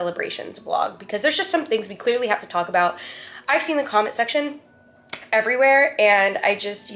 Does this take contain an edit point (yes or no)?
no